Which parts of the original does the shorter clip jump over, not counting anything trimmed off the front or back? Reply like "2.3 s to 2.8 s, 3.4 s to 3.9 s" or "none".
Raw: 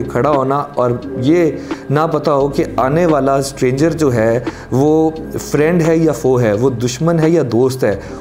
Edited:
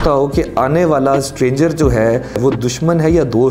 4.6 s to 6.6 s